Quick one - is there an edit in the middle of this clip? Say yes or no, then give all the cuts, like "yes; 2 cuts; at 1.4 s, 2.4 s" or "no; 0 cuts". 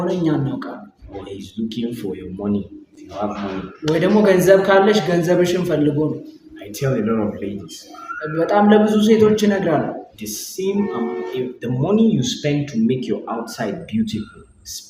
no; 0 cuts